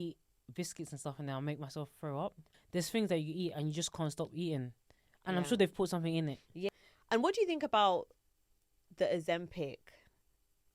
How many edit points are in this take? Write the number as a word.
two